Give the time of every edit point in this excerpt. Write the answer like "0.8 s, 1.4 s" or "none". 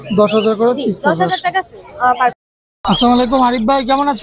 2.4 s